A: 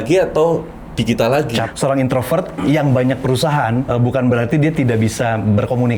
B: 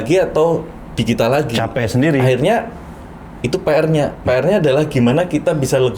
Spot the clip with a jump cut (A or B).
A